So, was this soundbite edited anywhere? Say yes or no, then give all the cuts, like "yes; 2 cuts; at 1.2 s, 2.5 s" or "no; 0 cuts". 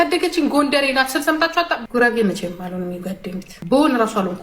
yes; 1 cut; at 1.8 s